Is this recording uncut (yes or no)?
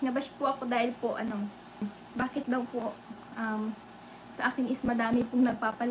no